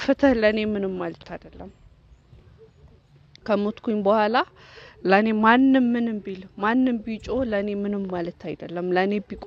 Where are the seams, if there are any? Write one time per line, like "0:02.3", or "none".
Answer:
none